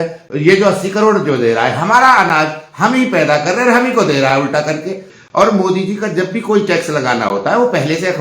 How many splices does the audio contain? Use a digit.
1